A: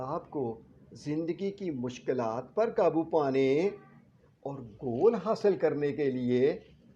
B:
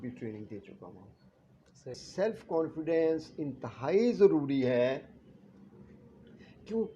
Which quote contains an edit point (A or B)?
B